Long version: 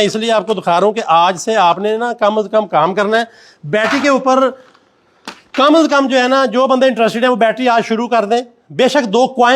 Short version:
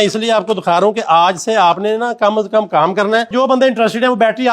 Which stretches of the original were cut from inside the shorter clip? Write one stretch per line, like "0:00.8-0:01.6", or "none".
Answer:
0:03.3-0:06.5